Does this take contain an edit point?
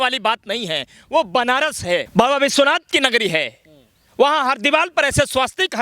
yes; 1 cut; at 2.1 s

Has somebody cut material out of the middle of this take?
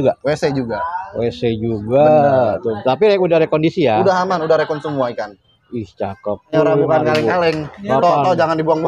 yes; 1 cut; at 6.5 s

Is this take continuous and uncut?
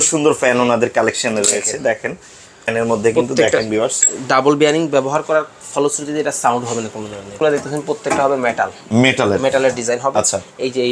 no; 2 cuts; at 2.6 s, 7.4 s

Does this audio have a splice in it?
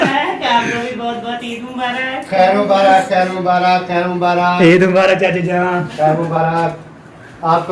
no; 0 cuts

